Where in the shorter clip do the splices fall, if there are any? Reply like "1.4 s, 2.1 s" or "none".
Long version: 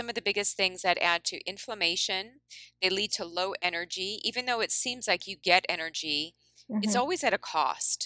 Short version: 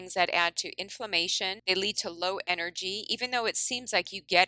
1.6 s